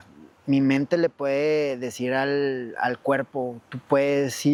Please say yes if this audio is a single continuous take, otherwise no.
yes